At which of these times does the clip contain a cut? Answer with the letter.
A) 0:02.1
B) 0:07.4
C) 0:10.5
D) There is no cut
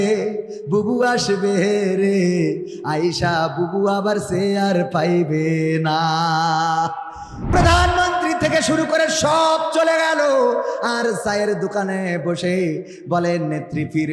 B